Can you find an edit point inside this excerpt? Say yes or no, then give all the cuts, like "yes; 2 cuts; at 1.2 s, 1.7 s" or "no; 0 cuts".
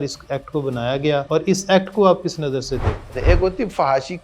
yes; 2 cuts; at 1.3 s, 3.1 s